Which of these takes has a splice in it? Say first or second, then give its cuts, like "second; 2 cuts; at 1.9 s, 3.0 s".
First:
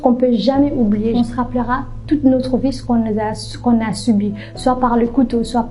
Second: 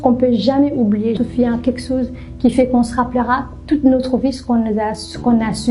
first; 1 cut; at 1.1 s